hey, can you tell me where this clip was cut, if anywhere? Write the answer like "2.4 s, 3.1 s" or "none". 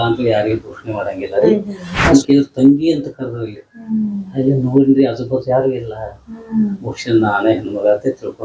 2.1 s

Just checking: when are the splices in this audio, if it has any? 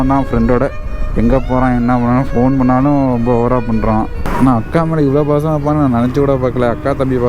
4.2 s

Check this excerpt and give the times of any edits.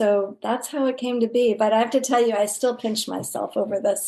none

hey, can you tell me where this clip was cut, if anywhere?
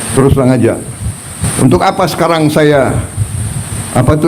1.4 s

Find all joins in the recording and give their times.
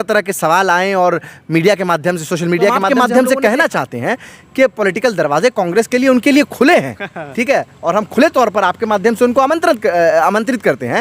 2.8 s

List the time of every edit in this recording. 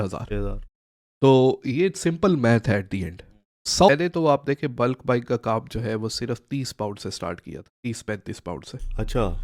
3.9 s

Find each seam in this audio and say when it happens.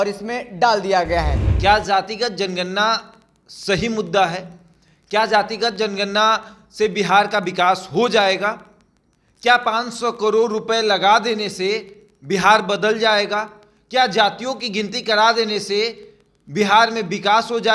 1.4 s

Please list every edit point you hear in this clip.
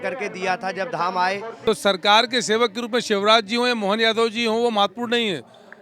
1.5 s

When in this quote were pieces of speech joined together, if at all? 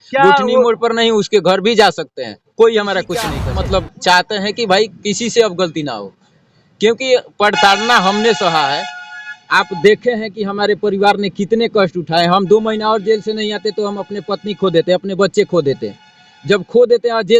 3.4 s

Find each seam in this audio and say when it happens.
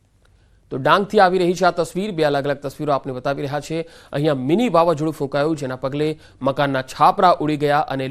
5.3 s

